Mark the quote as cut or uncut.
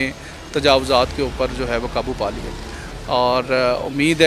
uncut